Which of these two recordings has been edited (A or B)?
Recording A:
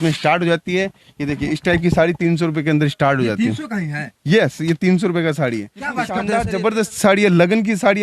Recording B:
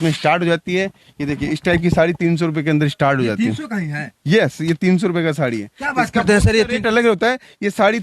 A